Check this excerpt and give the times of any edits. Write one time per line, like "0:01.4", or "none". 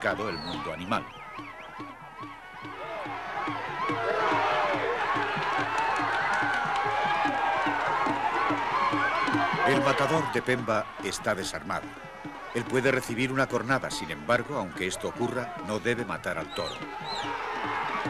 none

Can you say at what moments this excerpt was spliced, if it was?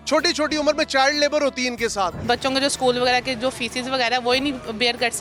0:02.2

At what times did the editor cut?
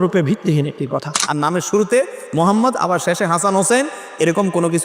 0:01.2

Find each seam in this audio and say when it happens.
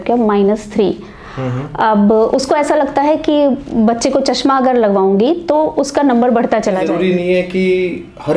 0:06.8

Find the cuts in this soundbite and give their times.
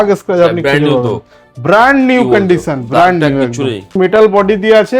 0:03.9

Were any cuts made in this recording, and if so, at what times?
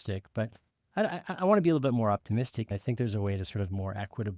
0:02.7

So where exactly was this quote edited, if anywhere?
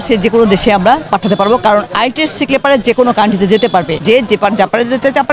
0:01.0
0:03.9

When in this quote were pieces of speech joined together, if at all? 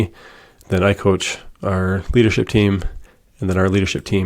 none

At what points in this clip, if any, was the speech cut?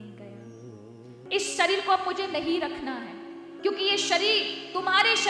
0:01.1
0:03.4

